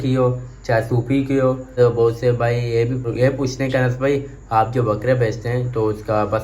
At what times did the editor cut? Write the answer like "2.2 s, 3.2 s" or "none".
1.7 s, 3.1 s